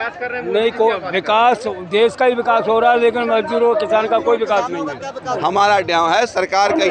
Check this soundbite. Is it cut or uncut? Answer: cut